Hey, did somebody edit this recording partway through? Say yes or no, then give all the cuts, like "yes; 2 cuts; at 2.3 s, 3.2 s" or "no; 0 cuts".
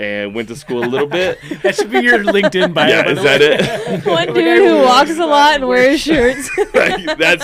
no; 0 cuts